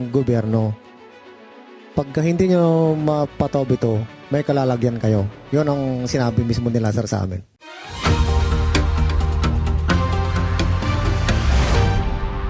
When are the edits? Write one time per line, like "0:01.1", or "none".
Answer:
none